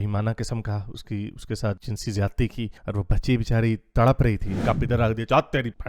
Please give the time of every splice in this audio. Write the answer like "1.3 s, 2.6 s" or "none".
4.6 s